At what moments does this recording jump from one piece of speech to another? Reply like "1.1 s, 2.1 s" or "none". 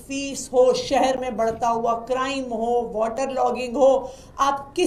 none